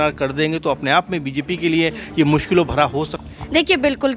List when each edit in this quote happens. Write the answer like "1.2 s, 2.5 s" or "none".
3.2 s

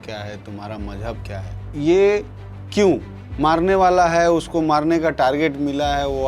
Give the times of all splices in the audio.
1.6 s

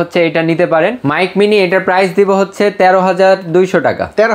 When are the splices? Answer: 1.0 s

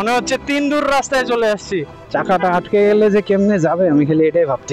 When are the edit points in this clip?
1.9 s

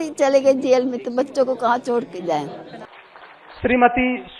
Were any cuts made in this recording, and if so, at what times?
2.8 s

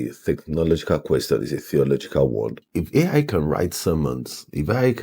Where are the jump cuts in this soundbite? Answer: 2.6 s

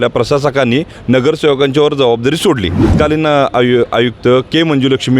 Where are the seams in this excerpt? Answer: 2.9 s

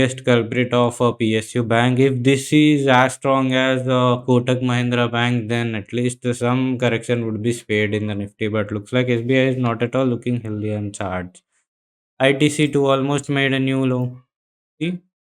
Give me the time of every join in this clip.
none

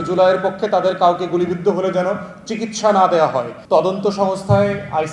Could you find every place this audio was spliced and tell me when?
3.5 s

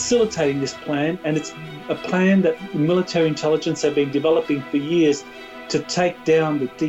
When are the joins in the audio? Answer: none

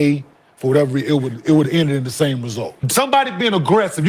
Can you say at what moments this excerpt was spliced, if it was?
2.8 s

